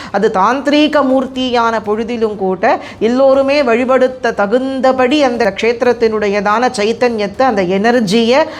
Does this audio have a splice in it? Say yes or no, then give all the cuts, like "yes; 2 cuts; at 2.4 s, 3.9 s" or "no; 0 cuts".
yes; 1 cut; at 5.5 s